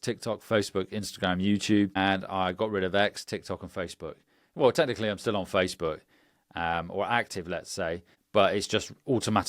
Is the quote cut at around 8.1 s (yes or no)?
yes